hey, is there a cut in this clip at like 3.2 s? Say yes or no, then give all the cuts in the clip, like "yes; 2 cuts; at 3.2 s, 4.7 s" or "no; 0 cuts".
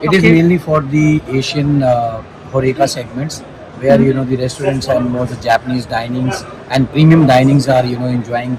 no; 0 cuts